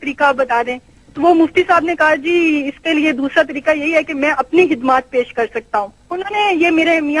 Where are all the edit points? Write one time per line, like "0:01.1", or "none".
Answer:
0:06.1

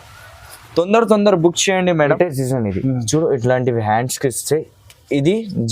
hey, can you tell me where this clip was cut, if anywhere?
0:02.1

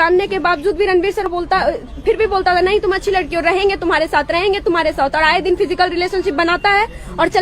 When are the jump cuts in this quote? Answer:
0:01.2

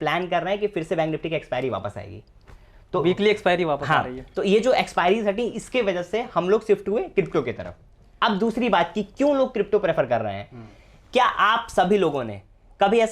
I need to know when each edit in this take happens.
none

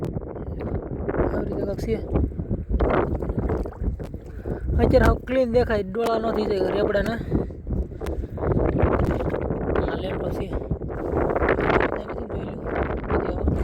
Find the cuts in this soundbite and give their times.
none

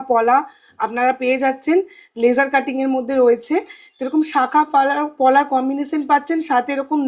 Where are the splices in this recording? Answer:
none

